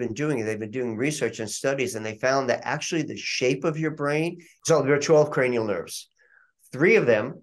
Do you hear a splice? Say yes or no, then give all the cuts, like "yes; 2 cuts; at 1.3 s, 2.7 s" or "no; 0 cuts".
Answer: yes; 1 cut; at 4.5 s